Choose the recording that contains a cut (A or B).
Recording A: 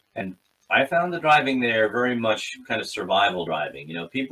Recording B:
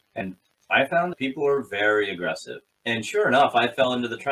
B